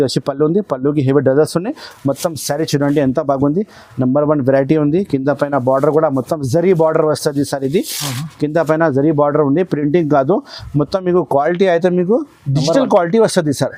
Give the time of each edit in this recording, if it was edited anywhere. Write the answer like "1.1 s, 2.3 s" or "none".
none

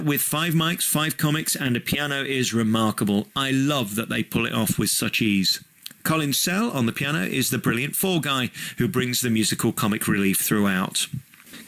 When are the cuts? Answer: 2.3 s

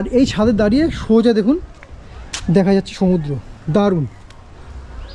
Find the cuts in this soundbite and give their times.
none

